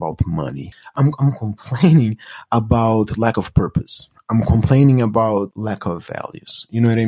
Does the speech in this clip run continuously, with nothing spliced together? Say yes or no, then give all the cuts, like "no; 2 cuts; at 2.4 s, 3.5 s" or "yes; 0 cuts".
no; 2 cuts; at 0.9 s, 5.5 s